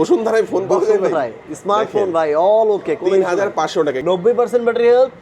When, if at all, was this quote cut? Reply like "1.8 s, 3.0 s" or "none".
4.0 s